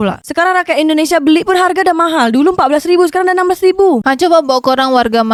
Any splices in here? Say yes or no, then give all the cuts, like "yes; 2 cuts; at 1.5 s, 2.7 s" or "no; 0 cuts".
no; 0 cuts